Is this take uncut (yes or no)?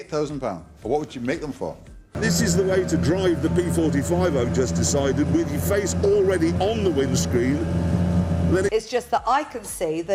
yes